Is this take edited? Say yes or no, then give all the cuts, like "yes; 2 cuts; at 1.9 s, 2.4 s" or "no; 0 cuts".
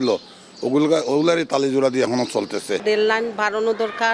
yes; 1 cut; at 2.8 s